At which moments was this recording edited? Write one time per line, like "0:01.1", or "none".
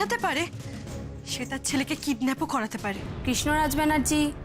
0:03.1